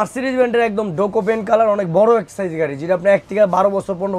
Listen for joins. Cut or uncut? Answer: uncut